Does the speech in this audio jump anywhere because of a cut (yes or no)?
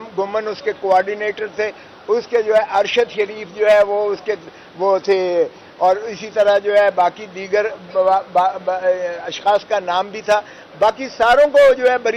no